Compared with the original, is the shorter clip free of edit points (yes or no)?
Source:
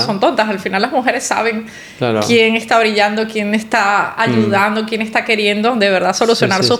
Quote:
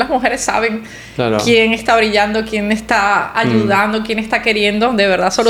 yes